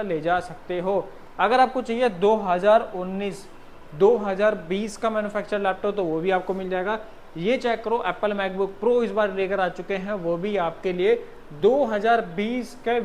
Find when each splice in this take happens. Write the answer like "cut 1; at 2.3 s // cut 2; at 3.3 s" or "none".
none

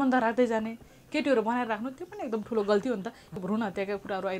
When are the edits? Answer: cut 1; at 3.4 s

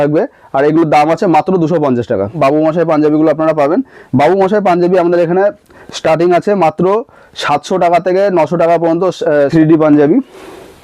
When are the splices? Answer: cut 1; at 2.3 s // cut 2; at 9.5 s

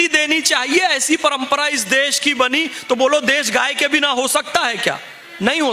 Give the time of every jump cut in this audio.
none

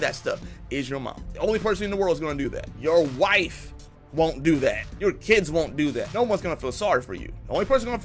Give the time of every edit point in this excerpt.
cut 1; at 1.2 s // cut 2; at 2.7 s // cut 3; at 4.9 s // cut 4; at 6.1 s

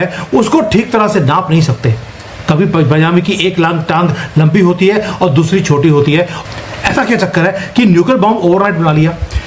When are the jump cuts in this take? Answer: cut 1; at 6.4 s

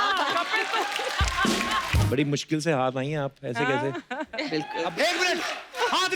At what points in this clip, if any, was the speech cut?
cut 1; at 2.1 s // cut 2; at 4.9 s

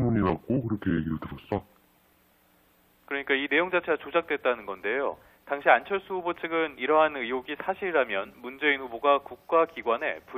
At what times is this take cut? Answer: none

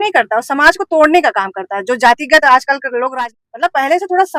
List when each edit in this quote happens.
cut 1; at 3.1 s

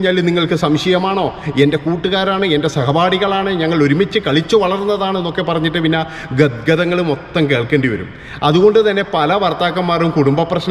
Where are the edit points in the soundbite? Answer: none

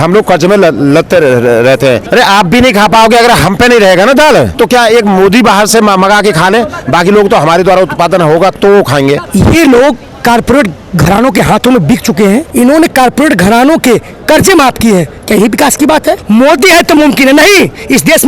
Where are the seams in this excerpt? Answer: cut 1; at 2.0 s // cut 2; at 4.5 s // cut 3; at 9.2 s // cut 4; at 12.5 s // cut 5; at 16.2 s

